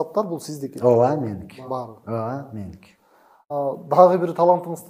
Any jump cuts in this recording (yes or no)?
yes